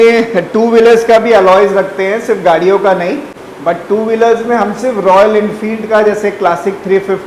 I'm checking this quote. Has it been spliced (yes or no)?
no